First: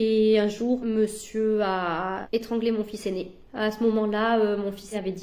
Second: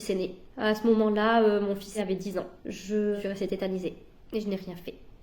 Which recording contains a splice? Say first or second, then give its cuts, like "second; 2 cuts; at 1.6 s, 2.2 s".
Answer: second; 1 cut; at 3.2 s